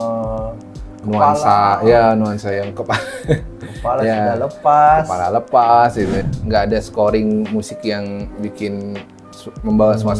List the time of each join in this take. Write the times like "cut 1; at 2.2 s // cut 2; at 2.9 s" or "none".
cut 1; at 6.2 s